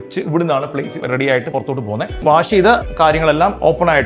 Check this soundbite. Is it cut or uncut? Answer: cut